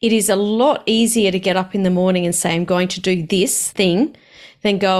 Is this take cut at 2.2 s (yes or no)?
no